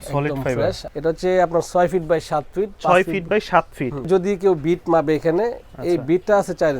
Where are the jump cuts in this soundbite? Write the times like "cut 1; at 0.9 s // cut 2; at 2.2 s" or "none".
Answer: cut 1; at 0.8 s // cut 2; at 4.1 s